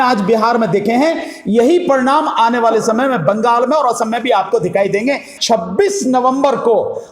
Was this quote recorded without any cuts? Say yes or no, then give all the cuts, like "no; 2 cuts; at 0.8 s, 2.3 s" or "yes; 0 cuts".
no; 1 cut; at 5.3 s